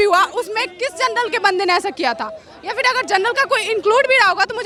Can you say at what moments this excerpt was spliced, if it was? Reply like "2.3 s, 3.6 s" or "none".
none